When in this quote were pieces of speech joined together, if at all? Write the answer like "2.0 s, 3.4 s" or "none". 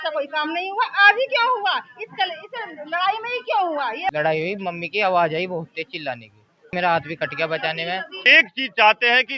4.1 s, 6.7 s, 8.2 s